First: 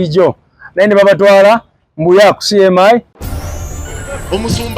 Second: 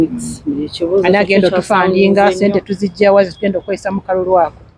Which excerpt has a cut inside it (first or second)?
first